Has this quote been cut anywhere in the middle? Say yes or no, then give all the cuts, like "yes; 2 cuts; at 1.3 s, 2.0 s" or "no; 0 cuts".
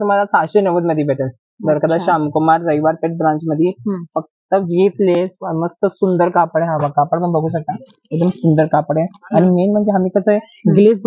no; 0 cuts